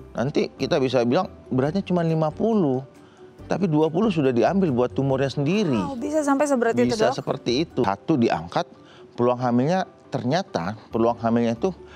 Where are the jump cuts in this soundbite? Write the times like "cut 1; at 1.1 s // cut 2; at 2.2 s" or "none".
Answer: cut 1; at 7.8 s